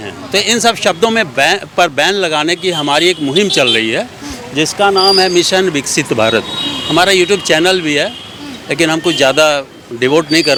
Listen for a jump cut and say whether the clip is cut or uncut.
uncut